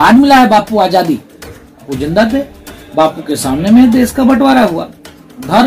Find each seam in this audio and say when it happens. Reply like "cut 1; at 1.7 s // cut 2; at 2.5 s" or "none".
cut 1; at 1.9 s